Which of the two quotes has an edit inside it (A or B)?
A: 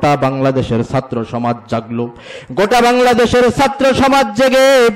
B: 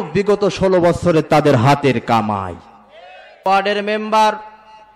B